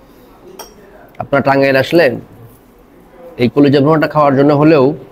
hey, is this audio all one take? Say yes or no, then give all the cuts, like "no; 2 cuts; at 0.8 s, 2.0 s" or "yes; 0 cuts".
yes; 0 cuts